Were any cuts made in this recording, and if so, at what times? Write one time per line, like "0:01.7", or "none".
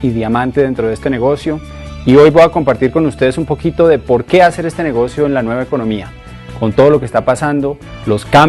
0:06.9